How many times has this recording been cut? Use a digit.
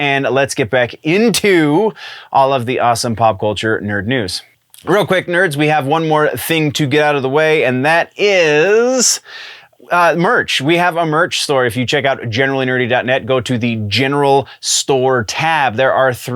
1